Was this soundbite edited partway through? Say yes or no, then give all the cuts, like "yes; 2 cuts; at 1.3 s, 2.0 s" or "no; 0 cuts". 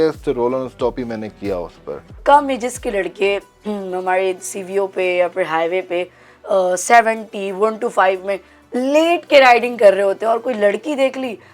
yes; 1 cut; at 2.1 s